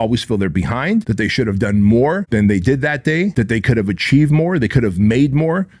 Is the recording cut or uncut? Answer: cut